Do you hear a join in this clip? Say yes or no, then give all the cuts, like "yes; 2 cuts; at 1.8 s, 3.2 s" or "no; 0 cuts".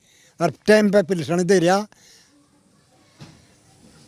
no; 0 cuts